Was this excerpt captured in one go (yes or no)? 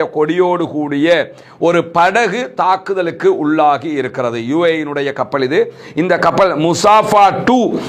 yes